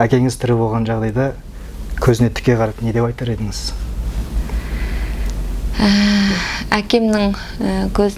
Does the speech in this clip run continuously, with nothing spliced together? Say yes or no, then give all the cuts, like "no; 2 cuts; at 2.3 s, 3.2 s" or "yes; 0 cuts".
yes; 0 cuts